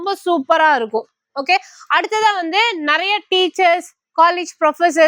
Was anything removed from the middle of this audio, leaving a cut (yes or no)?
no